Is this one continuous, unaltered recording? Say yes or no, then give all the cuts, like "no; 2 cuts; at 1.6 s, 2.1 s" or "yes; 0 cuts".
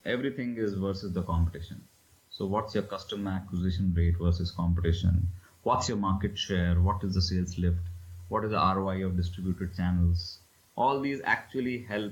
yes; 0 cuts